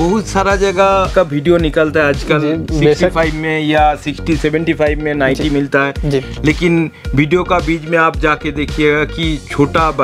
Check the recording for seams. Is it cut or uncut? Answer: cut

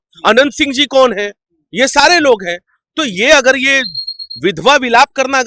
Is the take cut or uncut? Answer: uncut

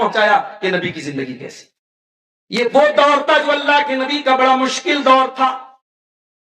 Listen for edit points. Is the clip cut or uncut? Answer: cut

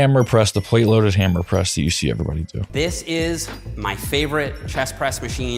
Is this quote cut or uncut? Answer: cut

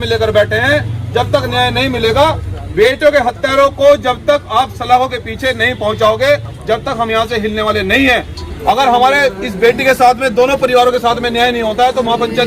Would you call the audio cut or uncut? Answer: cut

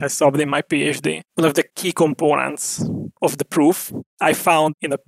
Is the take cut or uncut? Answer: cut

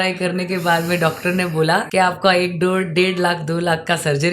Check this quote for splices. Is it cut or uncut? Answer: cut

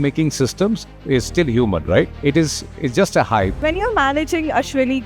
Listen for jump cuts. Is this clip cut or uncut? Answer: cut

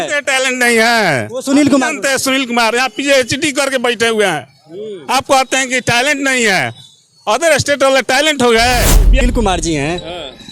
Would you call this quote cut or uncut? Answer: cut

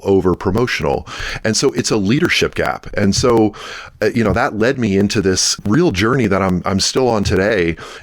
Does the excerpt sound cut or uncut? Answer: cut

